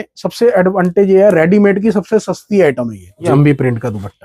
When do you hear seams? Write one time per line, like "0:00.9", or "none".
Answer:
0:03.3